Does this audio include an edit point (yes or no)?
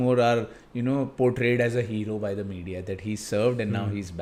no